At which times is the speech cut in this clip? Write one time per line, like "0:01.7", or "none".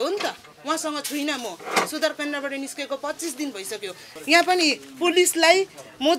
0:04.0